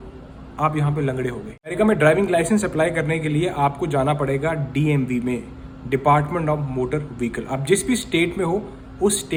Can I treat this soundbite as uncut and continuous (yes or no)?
yes